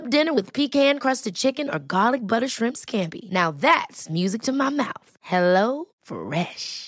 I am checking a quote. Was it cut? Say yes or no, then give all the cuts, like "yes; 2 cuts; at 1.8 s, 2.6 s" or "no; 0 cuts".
no; 0 cuts